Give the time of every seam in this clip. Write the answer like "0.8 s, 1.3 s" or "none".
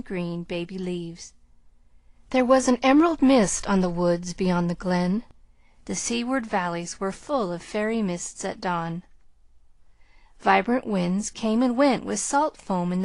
7.3 s